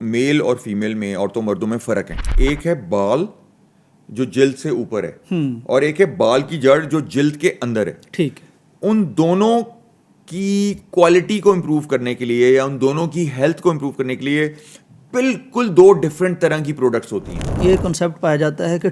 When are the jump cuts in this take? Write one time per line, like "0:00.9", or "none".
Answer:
0:02.2
0:17.6